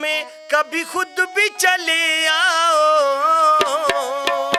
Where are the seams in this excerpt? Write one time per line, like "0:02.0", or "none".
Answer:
none